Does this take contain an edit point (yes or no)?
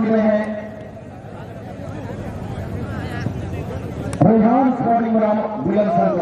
no